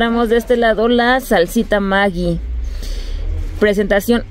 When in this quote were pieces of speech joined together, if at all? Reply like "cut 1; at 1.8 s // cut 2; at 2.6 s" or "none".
none